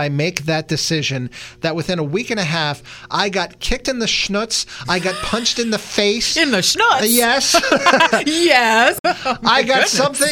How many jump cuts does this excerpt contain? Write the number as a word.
zero